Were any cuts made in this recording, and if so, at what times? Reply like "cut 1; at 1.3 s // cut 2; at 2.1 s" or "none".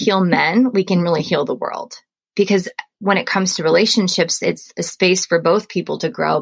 cut 1; at 2.9 s